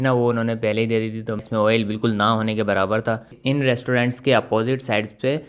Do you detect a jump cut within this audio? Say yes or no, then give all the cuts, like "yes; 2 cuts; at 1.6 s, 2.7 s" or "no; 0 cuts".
yes; 2 cuts; at 1.5 s, 3.3 s